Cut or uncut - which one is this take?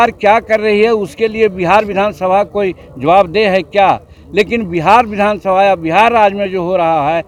uncut